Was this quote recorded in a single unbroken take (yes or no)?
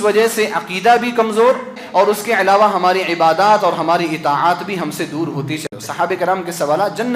no